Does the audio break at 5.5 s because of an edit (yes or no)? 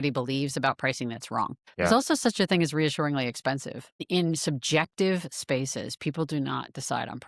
no